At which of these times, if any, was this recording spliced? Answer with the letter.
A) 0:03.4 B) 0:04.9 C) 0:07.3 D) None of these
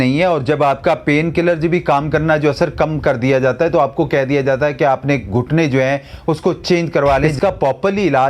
C